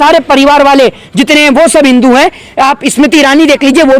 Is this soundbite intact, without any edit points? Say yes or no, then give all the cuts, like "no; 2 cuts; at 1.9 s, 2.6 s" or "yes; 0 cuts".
yes; 0 cuts